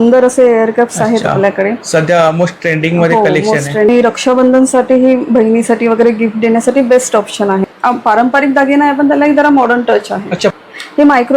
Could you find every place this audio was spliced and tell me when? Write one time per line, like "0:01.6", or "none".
0:03.9
0:07.7
0:10.5